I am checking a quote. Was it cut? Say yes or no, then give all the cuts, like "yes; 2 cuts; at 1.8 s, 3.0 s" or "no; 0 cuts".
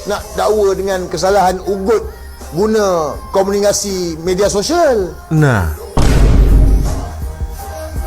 no; 0 cuts